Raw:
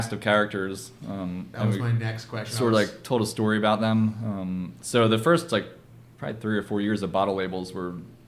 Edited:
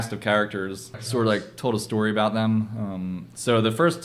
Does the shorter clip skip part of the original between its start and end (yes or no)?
yes